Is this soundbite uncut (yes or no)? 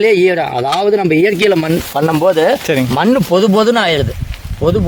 yes